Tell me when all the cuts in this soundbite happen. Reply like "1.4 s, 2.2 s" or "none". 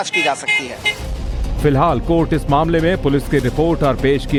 none